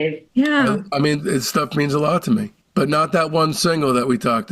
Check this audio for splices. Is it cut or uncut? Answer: cut